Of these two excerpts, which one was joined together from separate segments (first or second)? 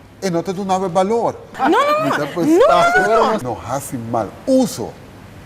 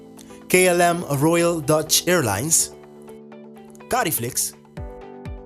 first